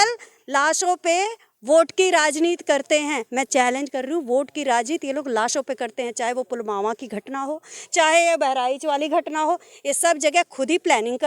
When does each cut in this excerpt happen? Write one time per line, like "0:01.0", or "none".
none